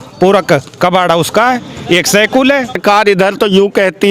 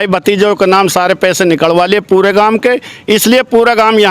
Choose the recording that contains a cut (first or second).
first